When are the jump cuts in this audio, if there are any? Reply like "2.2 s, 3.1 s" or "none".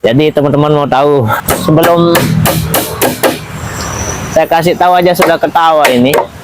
1.4 s